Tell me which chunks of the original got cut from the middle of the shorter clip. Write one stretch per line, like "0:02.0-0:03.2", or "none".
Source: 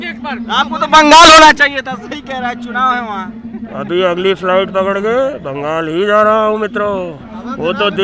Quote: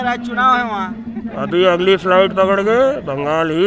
none